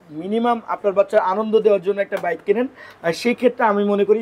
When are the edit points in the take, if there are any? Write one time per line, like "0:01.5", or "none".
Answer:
none